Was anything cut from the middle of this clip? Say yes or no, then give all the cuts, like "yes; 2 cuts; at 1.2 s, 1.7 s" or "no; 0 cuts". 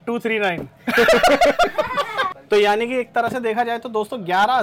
yes; 1 cut; at 2.3 s